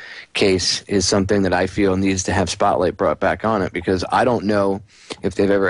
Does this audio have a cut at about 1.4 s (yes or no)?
no